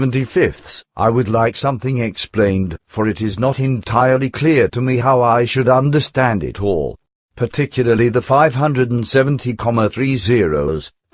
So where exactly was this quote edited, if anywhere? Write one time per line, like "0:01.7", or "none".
none